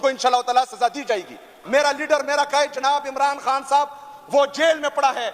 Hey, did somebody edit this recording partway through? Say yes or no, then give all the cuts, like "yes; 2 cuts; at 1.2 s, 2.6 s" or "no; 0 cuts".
yes; 1 cut; at 1.6 s